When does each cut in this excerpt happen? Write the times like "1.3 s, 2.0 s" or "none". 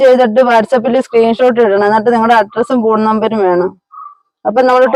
none

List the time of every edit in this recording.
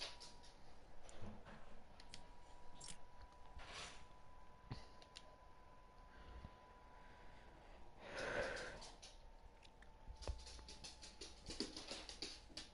none

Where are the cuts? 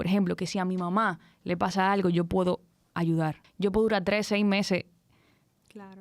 3.4 s

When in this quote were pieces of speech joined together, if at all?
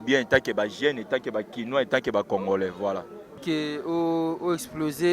3.4 s

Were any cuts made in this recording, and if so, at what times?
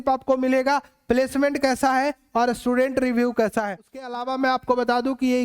4.1 s

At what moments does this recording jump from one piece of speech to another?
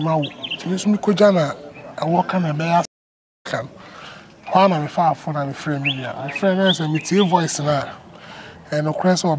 3.4 s

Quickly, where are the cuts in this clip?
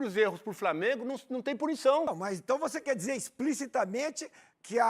2.1 s

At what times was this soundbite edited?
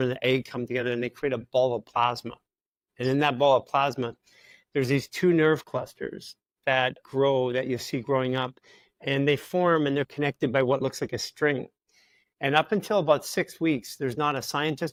none

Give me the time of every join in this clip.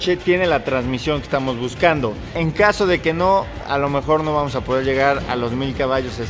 2.3 s

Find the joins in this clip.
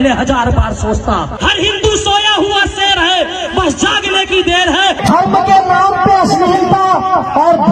5.0 s

